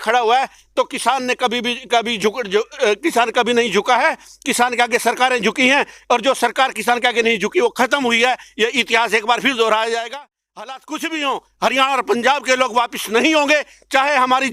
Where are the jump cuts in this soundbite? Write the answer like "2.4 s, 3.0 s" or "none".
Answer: none